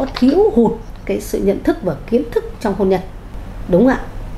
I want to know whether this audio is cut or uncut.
uncut